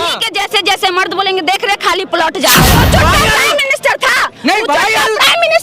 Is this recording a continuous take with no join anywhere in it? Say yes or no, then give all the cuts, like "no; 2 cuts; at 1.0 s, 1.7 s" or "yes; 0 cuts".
no; 1 cut; at 2.8 s